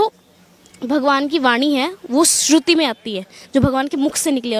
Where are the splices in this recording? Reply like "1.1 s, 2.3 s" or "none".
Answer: none